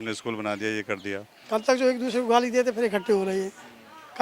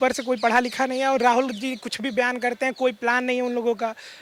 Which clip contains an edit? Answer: first; 1 cut; at 1.3 s

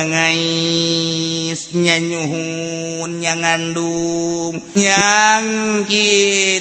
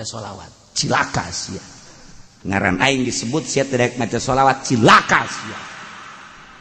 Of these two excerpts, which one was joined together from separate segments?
first; 1 cut; at 4.7 s

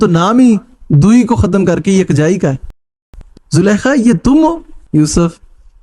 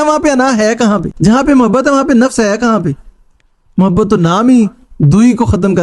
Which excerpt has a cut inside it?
first; 2 cuts; at 2.8 s, 4.7 s

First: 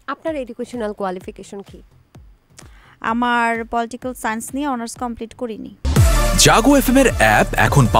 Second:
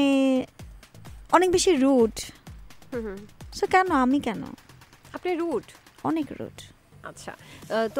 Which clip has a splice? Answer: first; 1 cut; at 5.8 s

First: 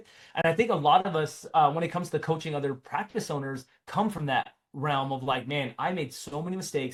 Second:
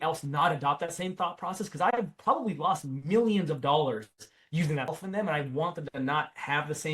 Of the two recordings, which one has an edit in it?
second; 1 cut; at 4.9 s

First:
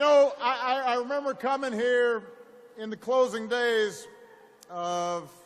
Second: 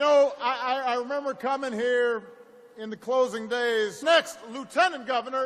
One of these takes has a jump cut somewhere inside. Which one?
first; 1 cut; at 4.0 s

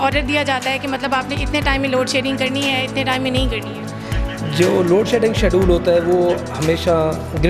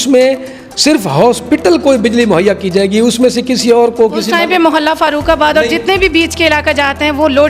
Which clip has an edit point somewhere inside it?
second; 1 cut; at 2.5 s

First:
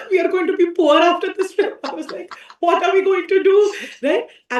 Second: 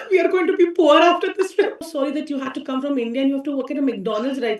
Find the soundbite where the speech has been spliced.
second; 1 cut; at 1.8 s

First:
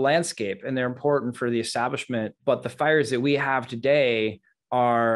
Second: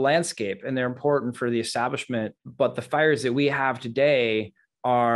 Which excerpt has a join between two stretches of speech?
first; 1 cut; at 2.3 s

